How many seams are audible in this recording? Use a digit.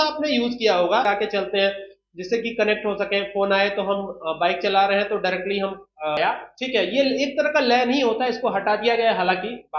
2